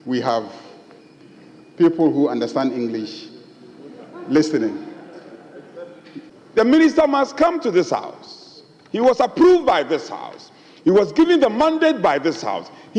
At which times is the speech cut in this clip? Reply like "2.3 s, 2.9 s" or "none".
6.3 s